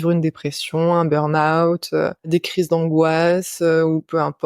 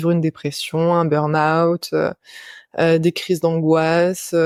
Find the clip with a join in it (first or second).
first